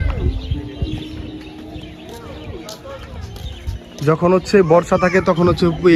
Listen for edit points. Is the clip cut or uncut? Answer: uncut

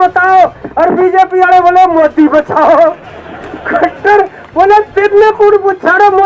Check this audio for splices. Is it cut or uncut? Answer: uncut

